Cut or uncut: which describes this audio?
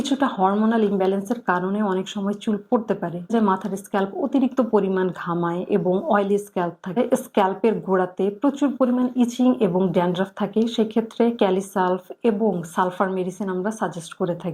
cut